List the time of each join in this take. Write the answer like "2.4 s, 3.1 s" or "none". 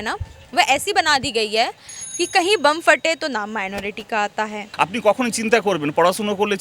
4.6 s